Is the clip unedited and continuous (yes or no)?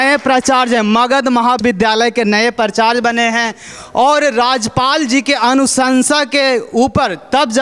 yes